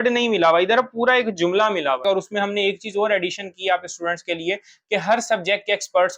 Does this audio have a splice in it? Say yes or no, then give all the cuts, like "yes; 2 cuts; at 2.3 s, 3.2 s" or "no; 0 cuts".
yes; 1 cut; at 2.0 s